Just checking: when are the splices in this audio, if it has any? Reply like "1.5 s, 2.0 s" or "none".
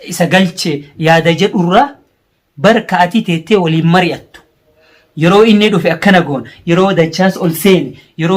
none

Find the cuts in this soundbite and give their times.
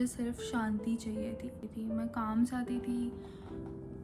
1.7 s

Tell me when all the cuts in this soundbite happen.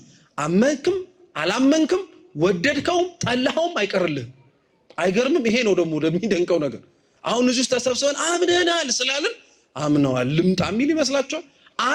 none

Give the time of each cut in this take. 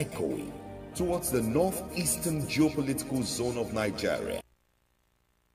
4.4 s

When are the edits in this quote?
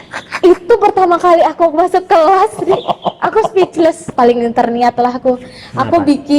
4.1 s

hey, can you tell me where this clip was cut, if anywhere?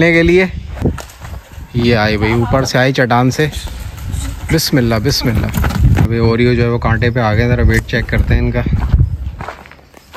0.8 s, 6.1 s

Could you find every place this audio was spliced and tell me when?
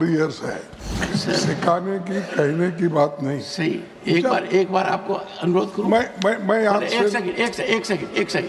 1.0 s

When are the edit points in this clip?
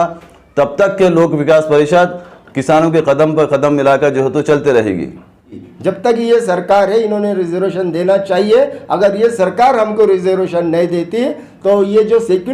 5.6 s

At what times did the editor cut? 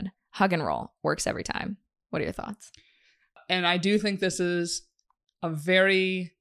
3.4 s

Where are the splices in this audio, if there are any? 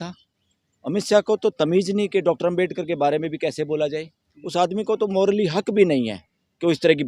none

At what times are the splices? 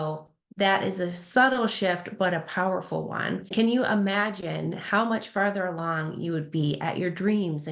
3.5 s

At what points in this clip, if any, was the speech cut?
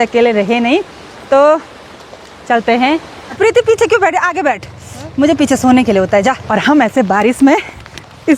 3.2 s, 6.4 s

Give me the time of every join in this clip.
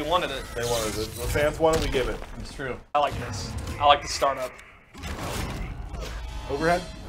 2.9 s

